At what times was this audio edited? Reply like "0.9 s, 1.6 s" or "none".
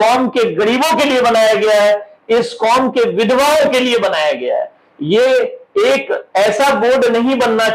none